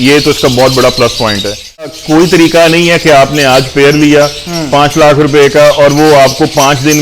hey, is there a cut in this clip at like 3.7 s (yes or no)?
no